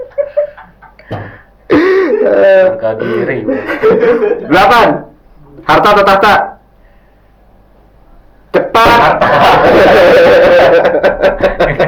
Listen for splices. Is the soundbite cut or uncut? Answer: uncut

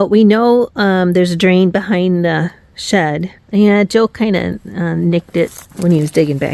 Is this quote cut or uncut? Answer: cut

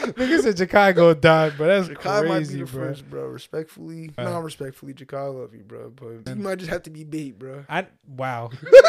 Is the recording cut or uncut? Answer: cut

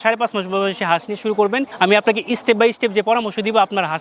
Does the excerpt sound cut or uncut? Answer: cut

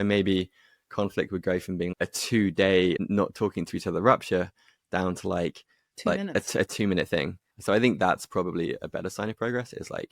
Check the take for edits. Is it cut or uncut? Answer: cut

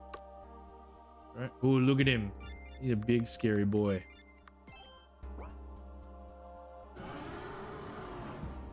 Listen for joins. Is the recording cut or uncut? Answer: uncut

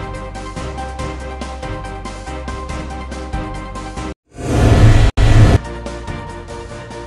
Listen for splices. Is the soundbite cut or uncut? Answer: cut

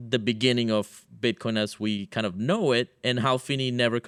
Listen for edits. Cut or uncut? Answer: uncut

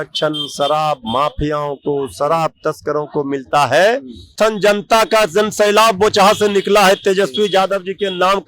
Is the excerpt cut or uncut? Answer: cut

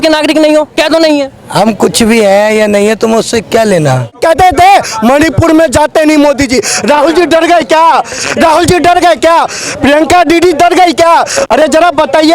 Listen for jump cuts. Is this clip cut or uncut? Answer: cut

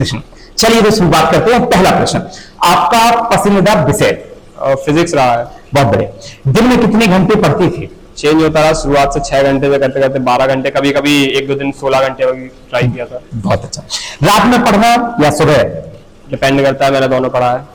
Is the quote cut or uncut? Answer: uncut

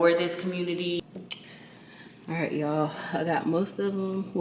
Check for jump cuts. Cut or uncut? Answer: cut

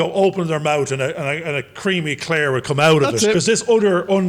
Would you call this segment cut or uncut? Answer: cut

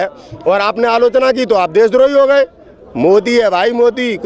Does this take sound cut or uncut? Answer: uncut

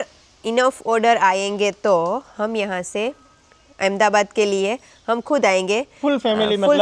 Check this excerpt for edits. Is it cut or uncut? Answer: uncut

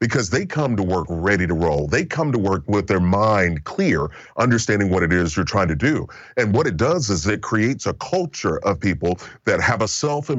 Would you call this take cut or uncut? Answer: uncut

